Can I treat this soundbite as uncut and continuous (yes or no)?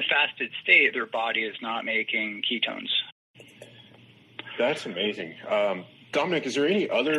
no